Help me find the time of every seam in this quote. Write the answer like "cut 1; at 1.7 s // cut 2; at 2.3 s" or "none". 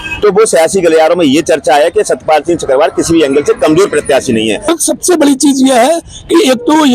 cut 1; at 4.7 s